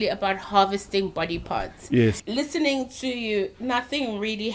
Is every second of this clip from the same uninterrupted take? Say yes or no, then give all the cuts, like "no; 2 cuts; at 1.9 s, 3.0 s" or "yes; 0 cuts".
no; 1 cut; at 2.2 s